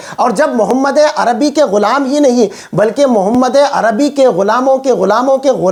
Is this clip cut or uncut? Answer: uncut